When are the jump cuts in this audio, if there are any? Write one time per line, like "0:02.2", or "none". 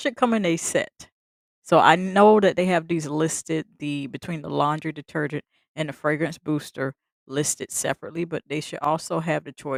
none

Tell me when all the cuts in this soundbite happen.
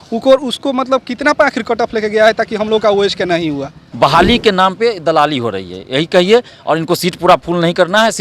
0:03.8

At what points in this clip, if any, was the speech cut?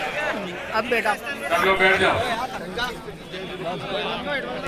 0:02.2

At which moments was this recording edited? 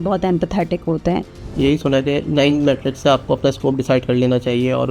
0:01.4

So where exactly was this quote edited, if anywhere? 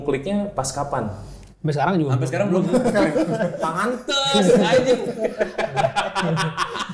none

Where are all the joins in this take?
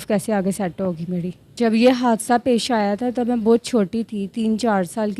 0:01.5

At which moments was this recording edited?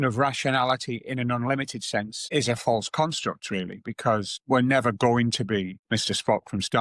none

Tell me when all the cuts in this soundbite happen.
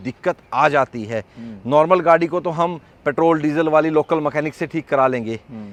none

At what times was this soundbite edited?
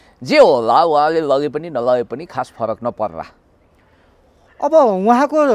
none

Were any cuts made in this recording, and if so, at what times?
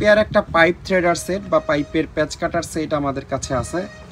none

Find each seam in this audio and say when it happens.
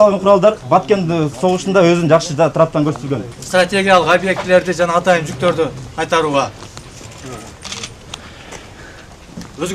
0:03.3

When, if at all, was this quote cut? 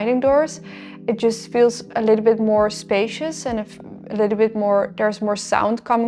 none

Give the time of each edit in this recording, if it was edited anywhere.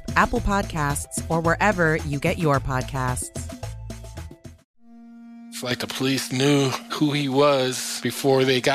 0:04.6

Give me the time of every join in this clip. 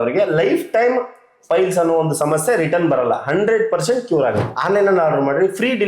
0:04.4

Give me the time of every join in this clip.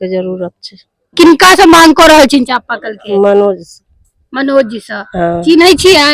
0:01.1

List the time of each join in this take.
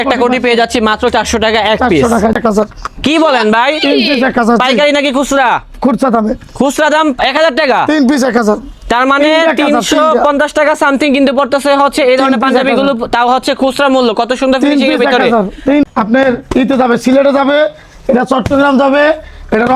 0:02.3
0:15.8

